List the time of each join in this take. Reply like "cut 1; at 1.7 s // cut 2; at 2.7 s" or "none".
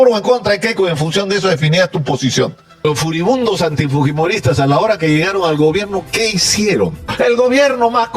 cut 1; at 2.8 s // cut 2; at 7.1 s